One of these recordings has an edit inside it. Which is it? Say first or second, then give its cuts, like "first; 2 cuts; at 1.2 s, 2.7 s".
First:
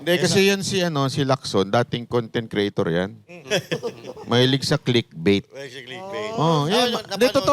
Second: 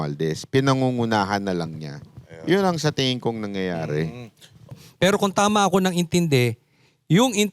second; 1 cut; at 4.8 s